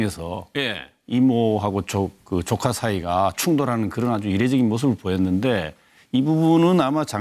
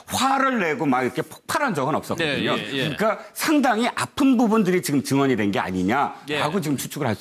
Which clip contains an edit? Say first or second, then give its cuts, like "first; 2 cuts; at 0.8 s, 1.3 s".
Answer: second; 1 cut; at 5.6 s